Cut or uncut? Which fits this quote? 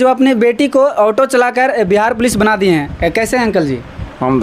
uncut